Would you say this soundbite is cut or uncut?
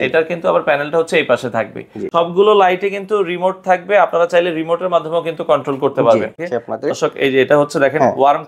cut